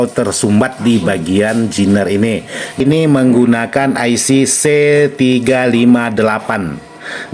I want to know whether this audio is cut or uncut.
cut